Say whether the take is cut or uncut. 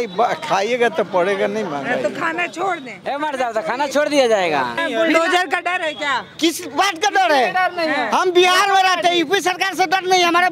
cut